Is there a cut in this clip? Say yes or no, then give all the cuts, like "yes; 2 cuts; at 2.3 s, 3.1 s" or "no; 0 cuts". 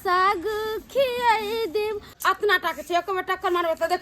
yes; 1 cut; at 2.1 s